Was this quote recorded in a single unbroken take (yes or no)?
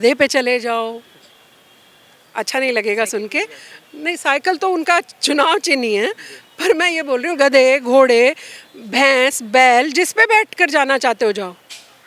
yes